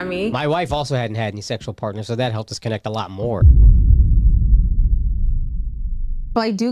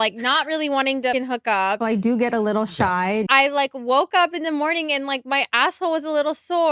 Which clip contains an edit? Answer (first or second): second